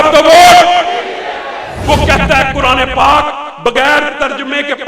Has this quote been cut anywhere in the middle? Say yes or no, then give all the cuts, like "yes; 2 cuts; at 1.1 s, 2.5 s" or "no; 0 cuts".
yes; 1 cut; at 1.8 s